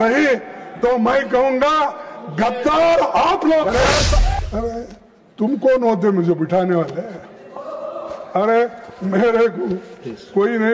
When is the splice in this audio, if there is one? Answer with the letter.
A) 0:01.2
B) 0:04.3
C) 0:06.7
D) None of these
B